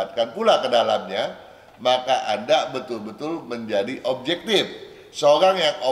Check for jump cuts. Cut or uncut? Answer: uncut